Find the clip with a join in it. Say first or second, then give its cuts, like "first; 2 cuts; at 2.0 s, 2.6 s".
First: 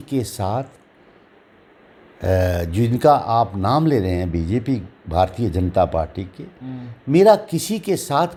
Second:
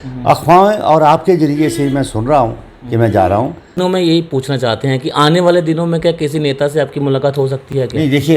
second; 1 cut; at 3.8 s